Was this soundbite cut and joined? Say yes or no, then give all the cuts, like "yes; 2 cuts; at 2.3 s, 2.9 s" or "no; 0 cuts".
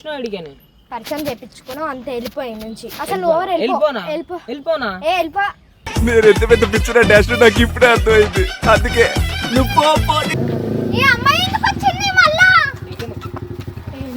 yes; 1 cut; at 10.3 s